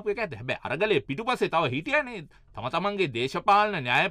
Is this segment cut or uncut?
uncut